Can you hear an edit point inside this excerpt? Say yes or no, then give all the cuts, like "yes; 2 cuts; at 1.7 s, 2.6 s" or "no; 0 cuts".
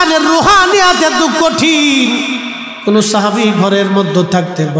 no; 0 cuts